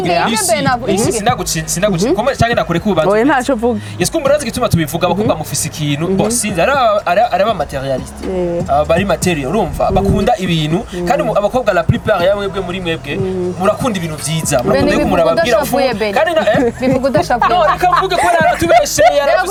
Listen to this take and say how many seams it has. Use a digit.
0